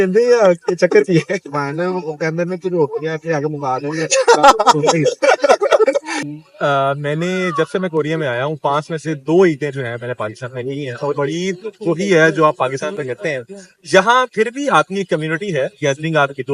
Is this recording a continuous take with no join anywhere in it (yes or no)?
yes